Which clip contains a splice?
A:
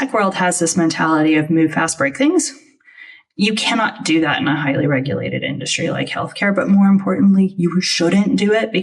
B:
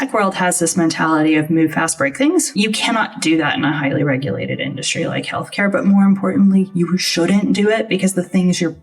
B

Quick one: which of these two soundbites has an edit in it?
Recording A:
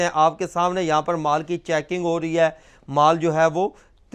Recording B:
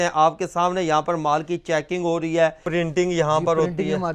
B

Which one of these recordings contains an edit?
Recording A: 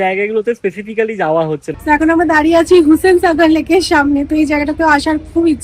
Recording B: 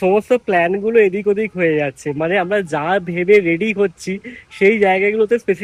A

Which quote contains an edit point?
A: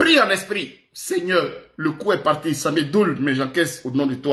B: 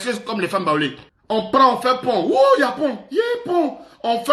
B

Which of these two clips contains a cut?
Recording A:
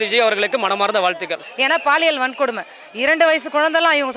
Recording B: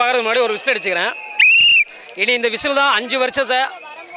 A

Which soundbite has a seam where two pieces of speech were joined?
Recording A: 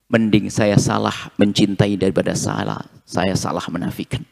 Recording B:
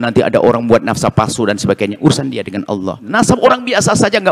B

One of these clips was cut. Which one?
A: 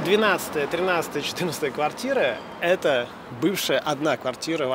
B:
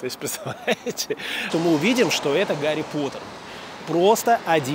B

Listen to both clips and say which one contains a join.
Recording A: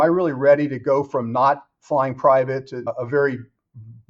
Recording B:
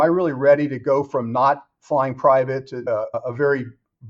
A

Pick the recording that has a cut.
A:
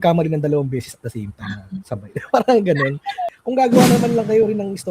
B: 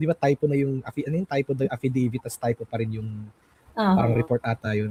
A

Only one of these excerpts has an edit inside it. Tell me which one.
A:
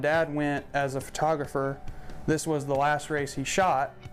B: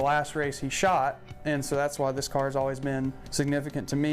B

